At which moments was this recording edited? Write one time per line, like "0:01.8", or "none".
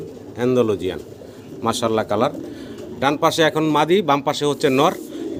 none